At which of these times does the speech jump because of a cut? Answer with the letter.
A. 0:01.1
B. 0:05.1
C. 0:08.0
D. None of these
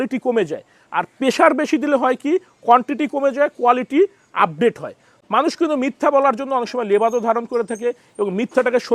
B